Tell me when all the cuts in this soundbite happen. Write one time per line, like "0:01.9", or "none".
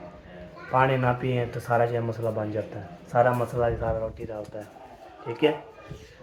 none

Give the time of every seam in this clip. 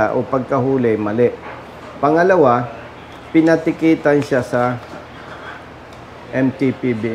none

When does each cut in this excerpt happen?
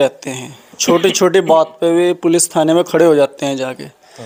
none

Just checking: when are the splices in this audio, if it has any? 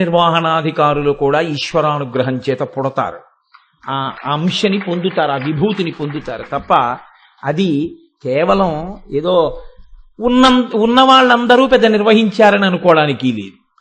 none

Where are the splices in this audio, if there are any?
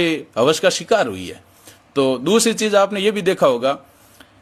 none

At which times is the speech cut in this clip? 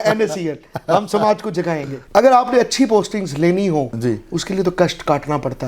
0:01.9

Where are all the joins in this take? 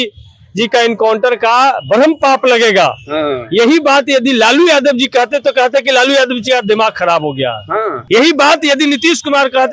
0:08.0

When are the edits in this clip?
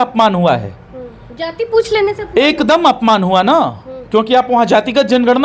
none

